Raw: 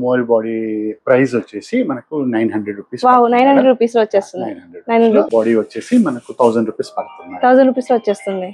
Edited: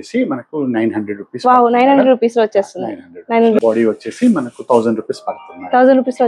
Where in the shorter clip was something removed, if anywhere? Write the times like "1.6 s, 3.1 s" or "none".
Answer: 3.6 s